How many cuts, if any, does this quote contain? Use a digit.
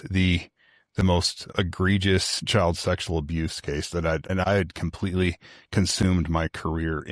3